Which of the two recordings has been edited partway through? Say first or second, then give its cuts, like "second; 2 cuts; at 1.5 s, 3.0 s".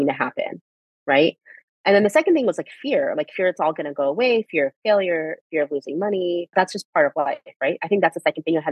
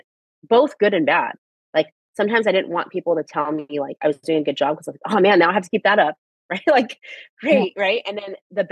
first; 1 cut; at 6.5 s